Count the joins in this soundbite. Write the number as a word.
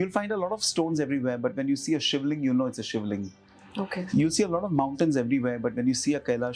zero